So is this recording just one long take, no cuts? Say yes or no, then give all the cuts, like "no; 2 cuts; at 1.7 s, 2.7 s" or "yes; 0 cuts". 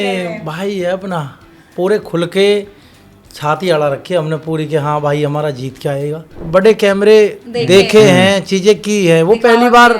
no; 1 cut; at 6.4 s